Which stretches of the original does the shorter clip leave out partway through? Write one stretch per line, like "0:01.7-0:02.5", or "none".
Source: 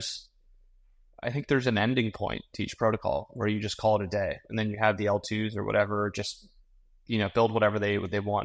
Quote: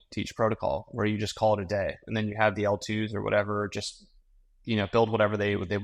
none